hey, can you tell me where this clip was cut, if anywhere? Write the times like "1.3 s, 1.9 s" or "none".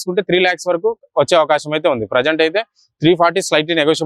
none